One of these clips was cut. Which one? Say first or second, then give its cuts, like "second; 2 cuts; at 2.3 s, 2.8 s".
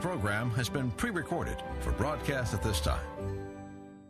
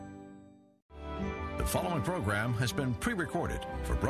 second; 1 cut; at 0.9 s